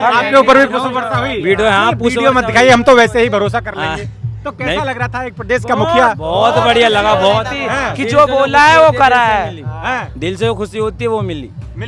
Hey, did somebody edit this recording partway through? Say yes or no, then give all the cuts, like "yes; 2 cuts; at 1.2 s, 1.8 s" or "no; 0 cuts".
no; 0 cuts